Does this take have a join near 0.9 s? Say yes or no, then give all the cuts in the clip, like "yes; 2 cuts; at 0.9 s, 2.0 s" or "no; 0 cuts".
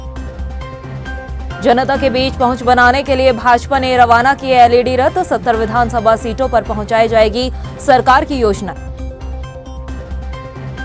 yes; 1 cut; at 0.9 s